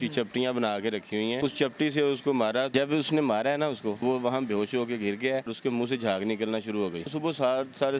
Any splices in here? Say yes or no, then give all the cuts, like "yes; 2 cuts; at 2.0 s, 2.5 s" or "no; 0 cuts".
yes; 5 cuts; at 1.4 s, 2.7 s, 4.0 s, 5.5 s, 7.0 s